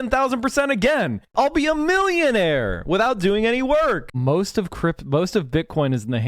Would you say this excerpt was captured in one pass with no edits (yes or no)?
no